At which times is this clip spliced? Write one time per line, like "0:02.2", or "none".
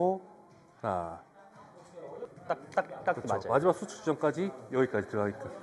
0:02.2